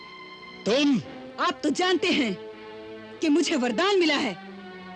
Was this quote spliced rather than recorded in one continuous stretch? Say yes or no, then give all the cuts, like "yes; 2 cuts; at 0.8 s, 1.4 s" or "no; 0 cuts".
yes; 1 cut; at 1.2 s